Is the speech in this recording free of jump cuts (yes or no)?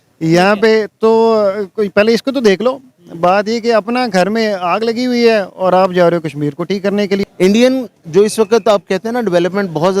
no